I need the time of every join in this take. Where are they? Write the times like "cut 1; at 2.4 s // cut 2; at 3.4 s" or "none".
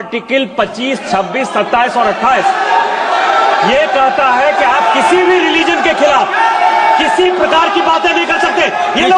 none